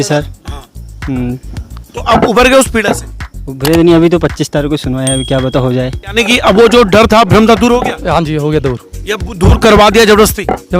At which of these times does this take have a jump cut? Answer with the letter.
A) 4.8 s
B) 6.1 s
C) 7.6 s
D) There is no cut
B